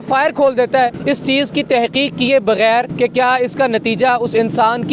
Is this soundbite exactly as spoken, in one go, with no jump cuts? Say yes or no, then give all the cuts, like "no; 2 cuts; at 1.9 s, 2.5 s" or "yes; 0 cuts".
no; 2 cuts; at 1.0 s, 2.9 s